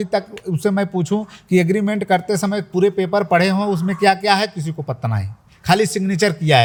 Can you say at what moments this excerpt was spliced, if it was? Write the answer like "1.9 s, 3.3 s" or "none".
none